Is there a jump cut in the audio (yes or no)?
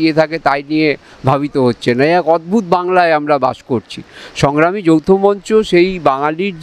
no